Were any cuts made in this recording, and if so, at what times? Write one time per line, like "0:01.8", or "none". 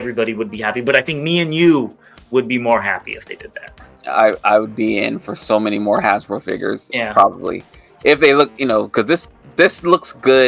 none

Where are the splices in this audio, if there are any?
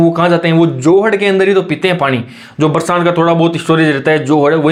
none

